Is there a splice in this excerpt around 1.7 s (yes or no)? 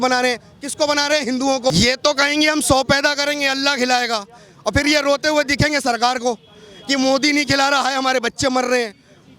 yes